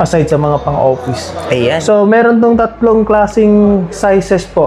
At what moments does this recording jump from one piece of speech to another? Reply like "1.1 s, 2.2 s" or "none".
none